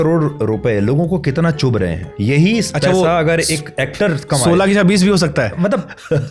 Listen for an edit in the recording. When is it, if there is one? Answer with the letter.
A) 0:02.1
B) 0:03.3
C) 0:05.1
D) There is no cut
A